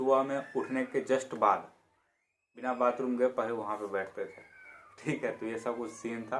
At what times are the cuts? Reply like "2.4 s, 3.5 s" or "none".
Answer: none